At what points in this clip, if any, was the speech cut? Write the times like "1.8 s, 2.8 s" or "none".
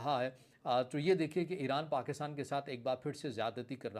none